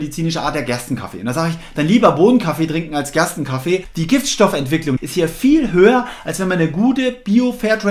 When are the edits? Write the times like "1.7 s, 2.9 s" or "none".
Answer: 3.9 s, 5.0 s